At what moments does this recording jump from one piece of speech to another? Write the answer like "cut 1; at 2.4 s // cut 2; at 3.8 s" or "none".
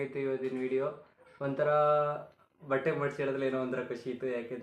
none